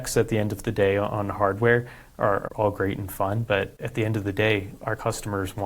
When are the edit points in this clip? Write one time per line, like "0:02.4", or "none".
0:02.4
0:03.8

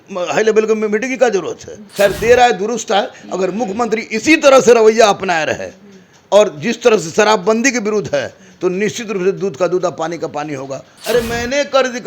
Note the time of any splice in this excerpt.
0:01.8
0:10.9

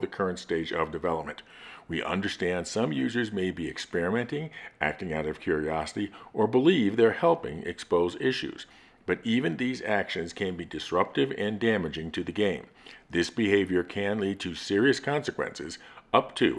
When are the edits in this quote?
none

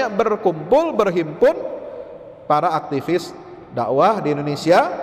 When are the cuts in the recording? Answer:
none

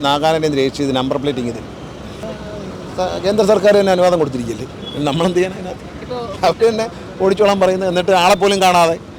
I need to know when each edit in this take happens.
0:02.2

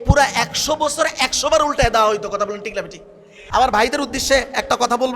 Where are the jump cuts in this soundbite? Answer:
0:03.3

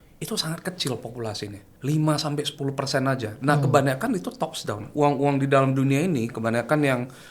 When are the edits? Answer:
0:01.7

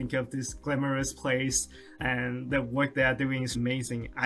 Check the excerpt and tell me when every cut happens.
none

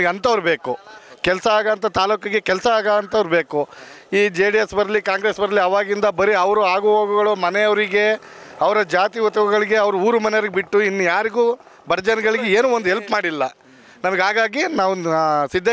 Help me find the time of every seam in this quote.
none

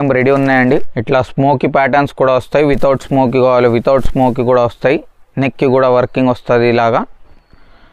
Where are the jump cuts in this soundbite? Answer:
0:00.9

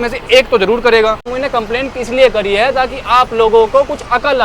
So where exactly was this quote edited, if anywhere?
0:01.3

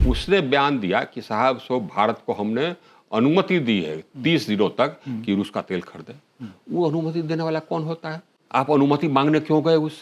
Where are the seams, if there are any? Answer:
0:08.3

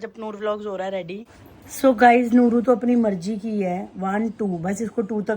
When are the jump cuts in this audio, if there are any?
0:01.2

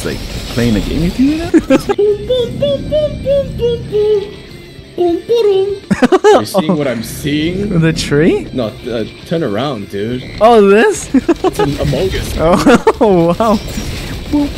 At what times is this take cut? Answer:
0:01.6
0:05.8
0:08.5
0:11.1

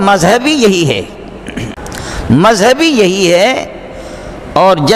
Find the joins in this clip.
0:01.7

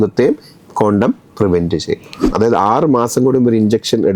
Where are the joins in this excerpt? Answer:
0:02.3

